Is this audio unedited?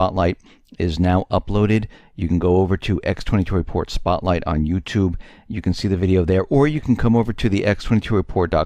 no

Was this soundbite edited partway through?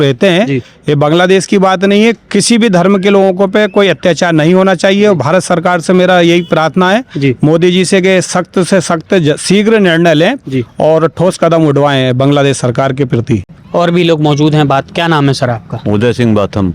no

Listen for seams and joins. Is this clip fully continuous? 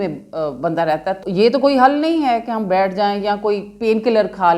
no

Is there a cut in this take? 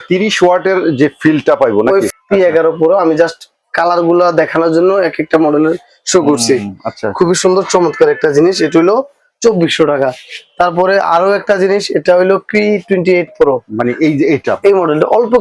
yes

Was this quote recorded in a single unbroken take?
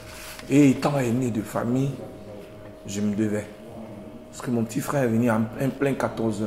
yes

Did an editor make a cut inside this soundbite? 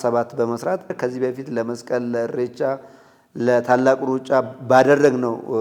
yes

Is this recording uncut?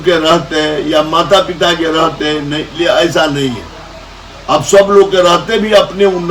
yes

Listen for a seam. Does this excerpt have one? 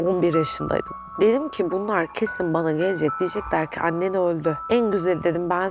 yes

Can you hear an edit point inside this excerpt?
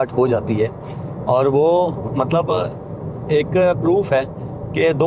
no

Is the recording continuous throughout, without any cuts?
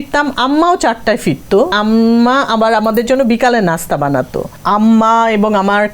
no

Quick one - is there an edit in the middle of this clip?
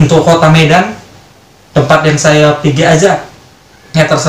no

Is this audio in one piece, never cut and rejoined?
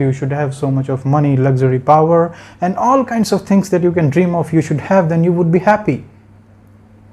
yes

